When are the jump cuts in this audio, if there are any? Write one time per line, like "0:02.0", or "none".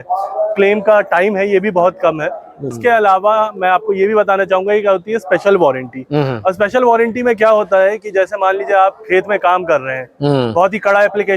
0:02.6